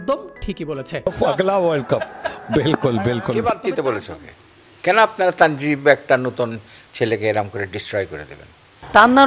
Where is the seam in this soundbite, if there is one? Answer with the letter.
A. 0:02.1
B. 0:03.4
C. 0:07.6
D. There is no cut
B